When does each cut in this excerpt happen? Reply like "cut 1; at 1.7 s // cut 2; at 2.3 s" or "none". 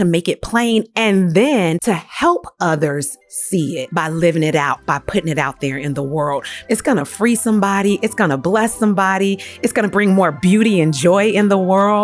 cut 1; at 1.8 s // cut 2; at 3.9 s // cut 3; at 6.5 s